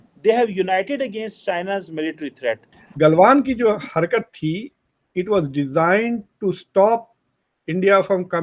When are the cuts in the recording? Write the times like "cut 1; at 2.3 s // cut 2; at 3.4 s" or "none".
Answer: cut 1; at 2.7 s